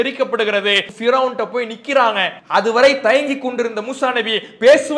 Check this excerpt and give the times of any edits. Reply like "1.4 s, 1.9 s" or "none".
0.9 s, 2.3 s